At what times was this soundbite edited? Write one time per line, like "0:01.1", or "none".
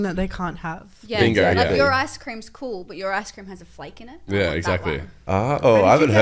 none